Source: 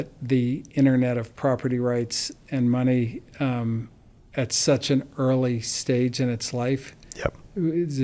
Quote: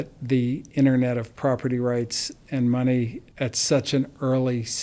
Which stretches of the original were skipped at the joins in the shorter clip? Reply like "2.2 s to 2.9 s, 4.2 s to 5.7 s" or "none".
3.2 s to 4.2 s

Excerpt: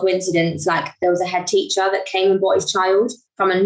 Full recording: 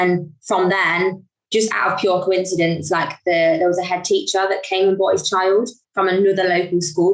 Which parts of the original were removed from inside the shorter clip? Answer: 3.3 s to 3.6 s

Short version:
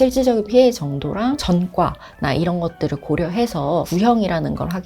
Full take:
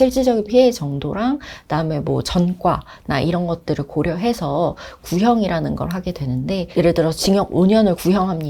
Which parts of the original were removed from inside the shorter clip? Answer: 1.4 s to 2.3 s, 4.7 s to 5.1 s

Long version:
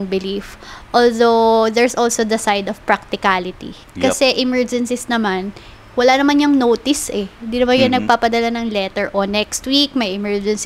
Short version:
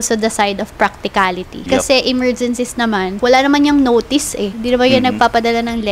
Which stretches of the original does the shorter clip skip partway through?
3.6 s to 3.8 s, 5.4 s to 5.9 s, 7.3 s to 7.4 s

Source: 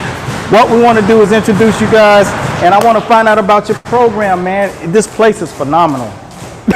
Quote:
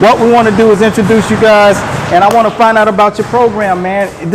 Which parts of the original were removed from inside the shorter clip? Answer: 3.9 s to 4.0 s

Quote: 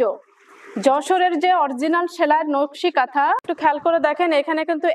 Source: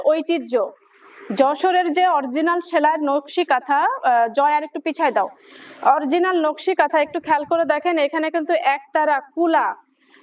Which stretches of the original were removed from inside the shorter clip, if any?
4.0 s to 7.1 s

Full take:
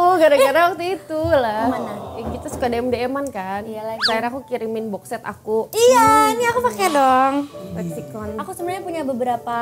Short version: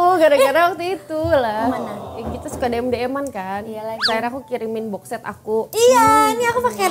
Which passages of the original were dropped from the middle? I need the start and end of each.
none

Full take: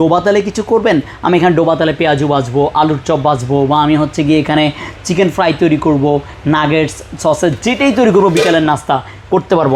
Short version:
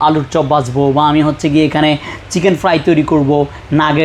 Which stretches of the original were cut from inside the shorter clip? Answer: none

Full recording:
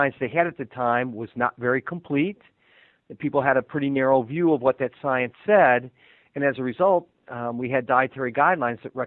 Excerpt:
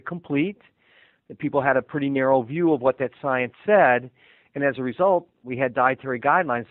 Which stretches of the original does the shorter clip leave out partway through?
7.2 s to 7.5 s

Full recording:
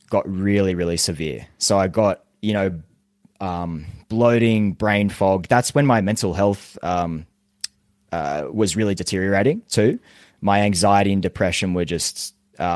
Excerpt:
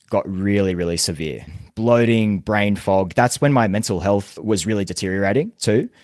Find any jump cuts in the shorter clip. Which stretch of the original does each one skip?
1.5 s to 3.8 s, 6.7 s to 8.5 s

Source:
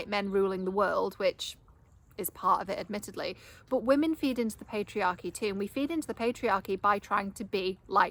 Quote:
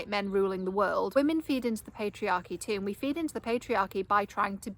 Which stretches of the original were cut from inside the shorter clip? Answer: 1.1 s to 3.9 s

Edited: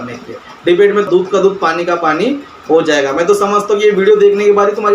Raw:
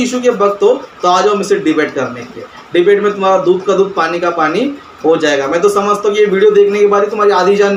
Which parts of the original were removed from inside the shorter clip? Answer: 3.2 s to 3.4 s

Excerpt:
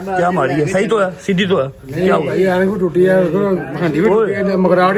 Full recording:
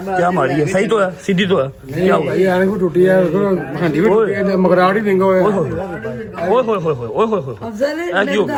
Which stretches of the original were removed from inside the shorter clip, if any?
none

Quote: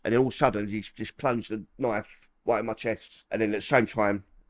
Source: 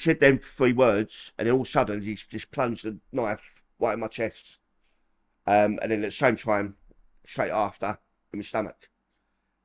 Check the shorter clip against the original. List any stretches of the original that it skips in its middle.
4.6 s to 5.8 s

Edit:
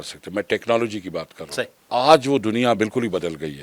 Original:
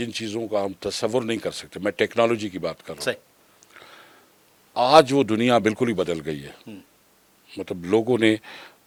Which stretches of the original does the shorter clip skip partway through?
3.3 s to 4.6 s

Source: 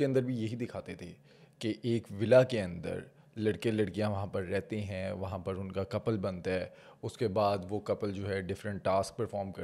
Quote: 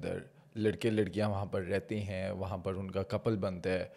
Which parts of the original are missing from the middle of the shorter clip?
none

